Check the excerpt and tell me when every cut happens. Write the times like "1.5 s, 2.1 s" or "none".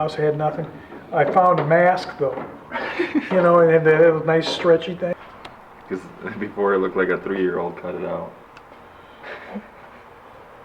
5.1 s